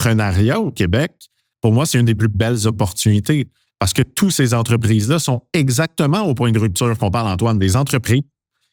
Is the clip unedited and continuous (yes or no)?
yes